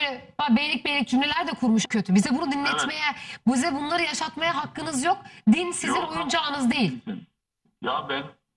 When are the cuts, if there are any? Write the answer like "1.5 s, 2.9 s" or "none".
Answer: 1.8 s